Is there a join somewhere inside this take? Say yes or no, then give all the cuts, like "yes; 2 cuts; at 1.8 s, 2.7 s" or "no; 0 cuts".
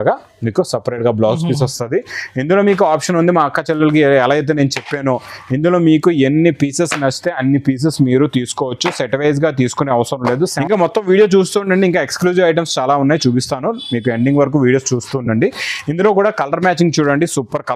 yes; 1 cut; at 10.6 s